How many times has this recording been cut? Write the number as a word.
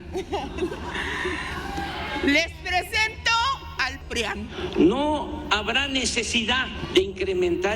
two